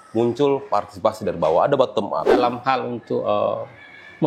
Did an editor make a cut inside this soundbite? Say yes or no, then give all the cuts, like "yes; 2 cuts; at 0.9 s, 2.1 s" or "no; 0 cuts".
yes; 1 cut; at 2.3 s